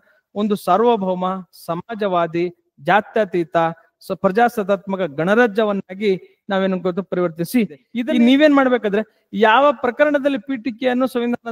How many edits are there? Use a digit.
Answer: 1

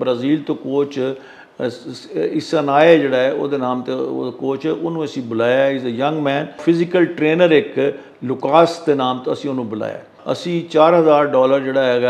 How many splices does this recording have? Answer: 2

